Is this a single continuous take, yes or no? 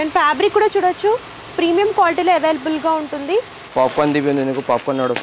no